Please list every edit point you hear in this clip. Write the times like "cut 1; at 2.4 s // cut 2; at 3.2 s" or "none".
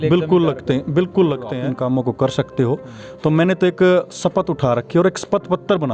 cut 1; at 1.6 s